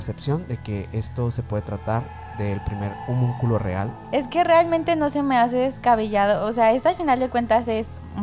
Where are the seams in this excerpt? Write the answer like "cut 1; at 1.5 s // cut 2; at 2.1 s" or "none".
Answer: cut 1; at 3.9 s